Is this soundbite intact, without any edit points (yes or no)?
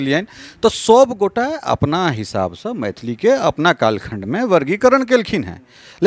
yes